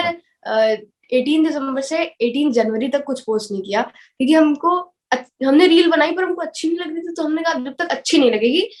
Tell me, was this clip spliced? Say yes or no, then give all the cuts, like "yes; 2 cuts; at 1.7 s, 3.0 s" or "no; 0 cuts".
no; 0 cuts